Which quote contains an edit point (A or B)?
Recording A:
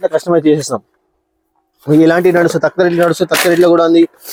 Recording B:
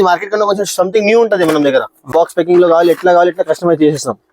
B